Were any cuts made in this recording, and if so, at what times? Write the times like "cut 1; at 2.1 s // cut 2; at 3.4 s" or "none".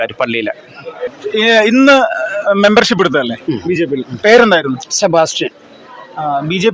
cut 1; at 1.2 s